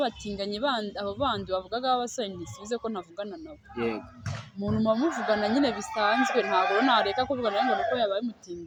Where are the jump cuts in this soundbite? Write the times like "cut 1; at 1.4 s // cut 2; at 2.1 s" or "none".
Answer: none